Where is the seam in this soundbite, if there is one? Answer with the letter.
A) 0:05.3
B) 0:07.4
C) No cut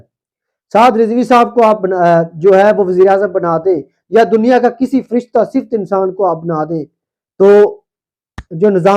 C